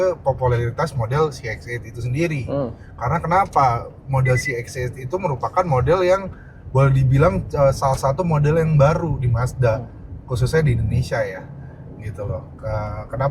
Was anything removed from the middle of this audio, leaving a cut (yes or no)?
no